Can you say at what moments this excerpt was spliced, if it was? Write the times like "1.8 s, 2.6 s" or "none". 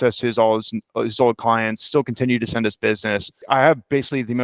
3.3 s